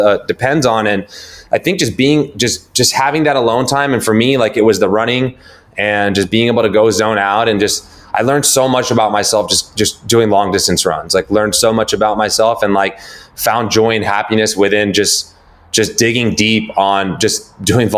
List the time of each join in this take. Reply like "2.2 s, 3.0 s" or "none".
none